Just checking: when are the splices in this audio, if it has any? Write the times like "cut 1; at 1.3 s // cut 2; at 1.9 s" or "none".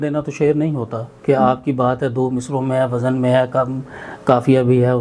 none